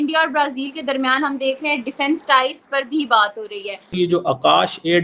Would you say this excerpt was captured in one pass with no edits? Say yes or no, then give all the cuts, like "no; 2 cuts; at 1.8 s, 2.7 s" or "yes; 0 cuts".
no; 1 cut; at 3.9 s